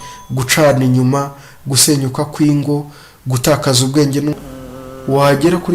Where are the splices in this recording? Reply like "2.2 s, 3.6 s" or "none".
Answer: 4.4 s